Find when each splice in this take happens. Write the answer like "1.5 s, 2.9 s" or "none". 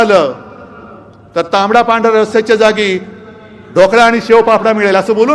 none